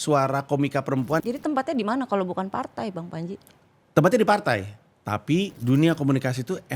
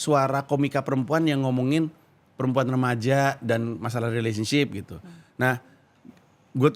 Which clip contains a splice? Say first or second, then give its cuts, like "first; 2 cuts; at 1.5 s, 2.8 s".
first; 2 cuts; at 1.2 s, 5.6 s